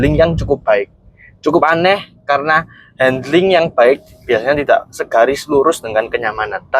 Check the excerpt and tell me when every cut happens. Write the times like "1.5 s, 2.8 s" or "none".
none